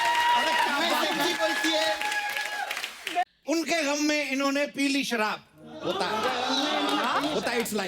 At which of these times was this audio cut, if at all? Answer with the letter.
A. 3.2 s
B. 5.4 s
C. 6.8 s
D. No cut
A